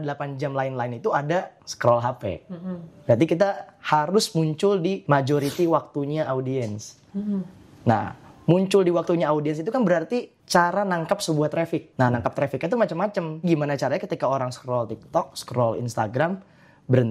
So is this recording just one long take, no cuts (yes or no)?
no